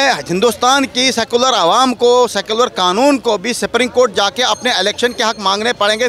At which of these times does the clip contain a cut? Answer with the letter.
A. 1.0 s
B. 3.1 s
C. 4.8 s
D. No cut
D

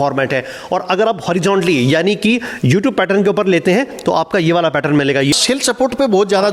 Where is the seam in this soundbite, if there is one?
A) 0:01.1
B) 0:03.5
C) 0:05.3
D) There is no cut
C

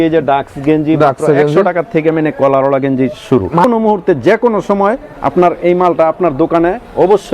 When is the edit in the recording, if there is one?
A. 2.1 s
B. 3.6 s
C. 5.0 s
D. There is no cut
B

